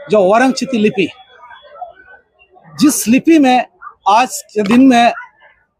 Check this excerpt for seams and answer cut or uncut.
uncut